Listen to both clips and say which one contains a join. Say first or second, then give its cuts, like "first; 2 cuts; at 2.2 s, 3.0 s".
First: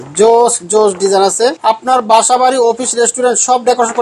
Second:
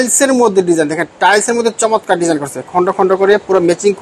first; 1 cut; at 1.6 s